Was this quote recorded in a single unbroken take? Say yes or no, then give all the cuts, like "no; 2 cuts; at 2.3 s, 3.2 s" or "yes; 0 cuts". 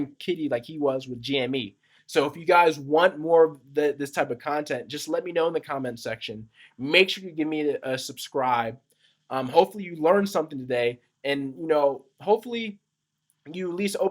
yes; 0 cuts